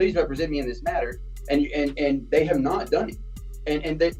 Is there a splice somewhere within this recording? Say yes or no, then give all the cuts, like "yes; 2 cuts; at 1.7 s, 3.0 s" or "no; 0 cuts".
no; 0 cuts